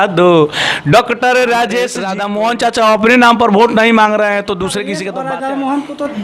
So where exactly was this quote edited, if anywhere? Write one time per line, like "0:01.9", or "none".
0:02.0
0:05.0